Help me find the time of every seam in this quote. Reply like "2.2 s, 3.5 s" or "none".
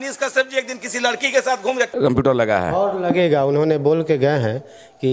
1.9 s